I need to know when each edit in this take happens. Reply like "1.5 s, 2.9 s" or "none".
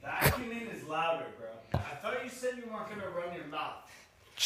1.8 s